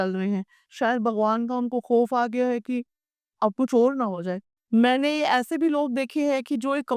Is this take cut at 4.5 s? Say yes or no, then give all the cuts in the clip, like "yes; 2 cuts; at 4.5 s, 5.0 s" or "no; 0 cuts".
yes; 1 cut; at 4.5 s